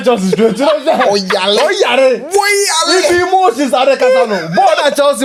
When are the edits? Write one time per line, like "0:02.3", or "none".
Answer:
none